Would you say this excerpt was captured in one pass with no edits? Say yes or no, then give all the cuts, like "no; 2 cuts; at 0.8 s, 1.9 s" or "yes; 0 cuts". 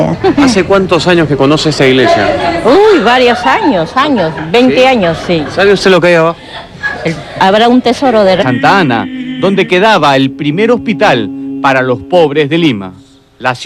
yes; 0 cuts